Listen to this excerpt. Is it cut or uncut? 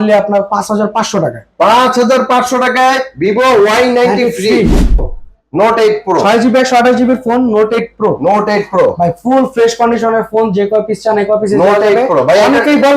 cut